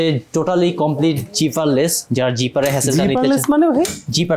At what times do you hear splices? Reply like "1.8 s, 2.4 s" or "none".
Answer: none